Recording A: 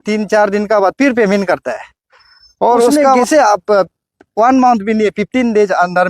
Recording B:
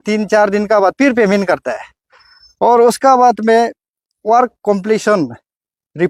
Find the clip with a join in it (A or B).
A